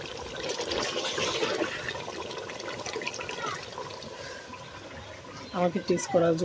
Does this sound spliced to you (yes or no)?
no